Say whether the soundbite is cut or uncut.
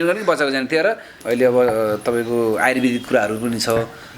cut